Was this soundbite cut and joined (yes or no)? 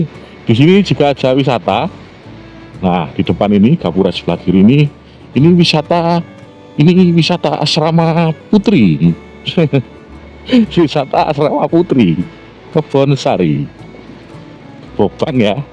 no